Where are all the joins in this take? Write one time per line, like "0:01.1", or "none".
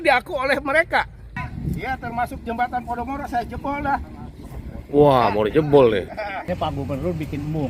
0:01.3
0:06.5